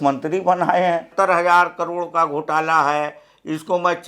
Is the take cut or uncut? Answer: cut